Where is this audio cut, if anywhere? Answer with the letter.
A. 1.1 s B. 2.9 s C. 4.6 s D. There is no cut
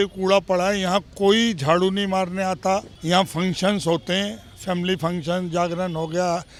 D